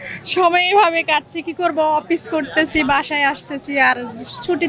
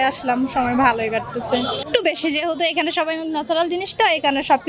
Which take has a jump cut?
second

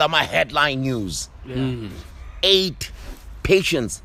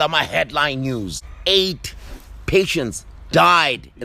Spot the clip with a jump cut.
second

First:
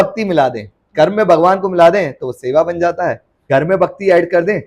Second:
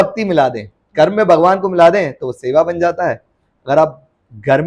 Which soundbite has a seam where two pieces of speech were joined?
first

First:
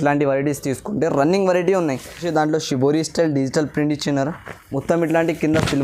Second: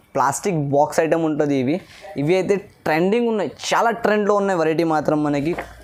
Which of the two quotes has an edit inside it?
first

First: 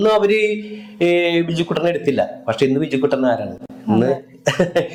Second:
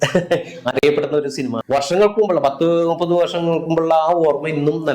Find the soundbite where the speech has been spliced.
second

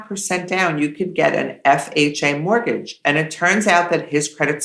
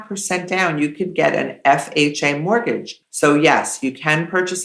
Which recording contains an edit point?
second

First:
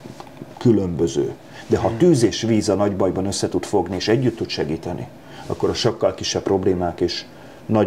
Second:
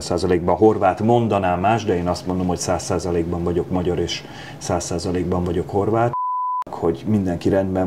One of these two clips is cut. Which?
second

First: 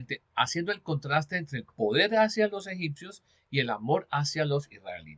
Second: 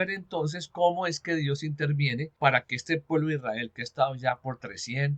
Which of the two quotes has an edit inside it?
second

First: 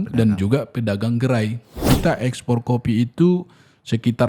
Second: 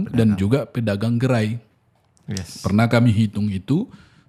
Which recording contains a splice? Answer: first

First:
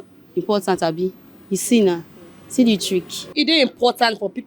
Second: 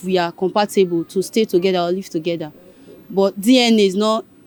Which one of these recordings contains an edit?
first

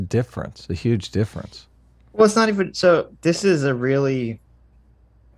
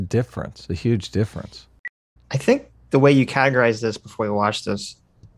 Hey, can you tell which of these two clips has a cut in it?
second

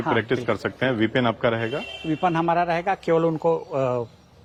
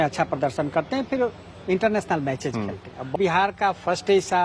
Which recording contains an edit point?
second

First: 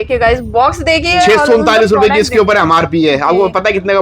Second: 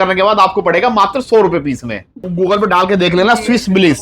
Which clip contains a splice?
second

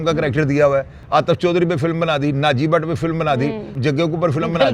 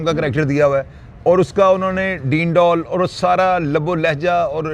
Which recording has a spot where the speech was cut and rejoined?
first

